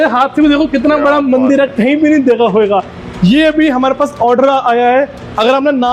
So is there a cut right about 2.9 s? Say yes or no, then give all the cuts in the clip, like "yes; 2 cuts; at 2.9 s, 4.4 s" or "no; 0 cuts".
no; 0 cuts